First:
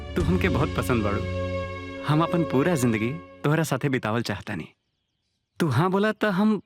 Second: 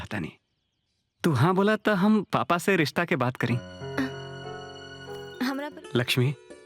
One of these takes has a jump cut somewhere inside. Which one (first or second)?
second